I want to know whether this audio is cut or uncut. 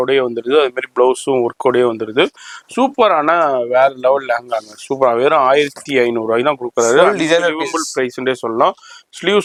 uncut